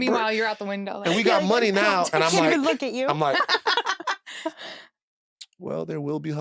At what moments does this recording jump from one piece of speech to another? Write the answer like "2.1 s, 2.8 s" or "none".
none